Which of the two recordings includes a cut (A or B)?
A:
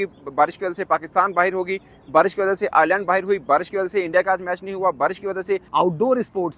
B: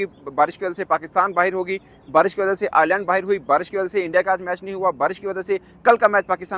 A